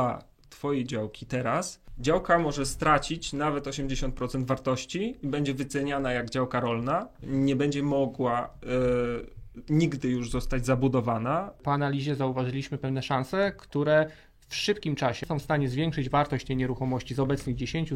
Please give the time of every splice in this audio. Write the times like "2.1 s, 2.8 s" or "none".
1.8 s, 11.6 s, 15.2 s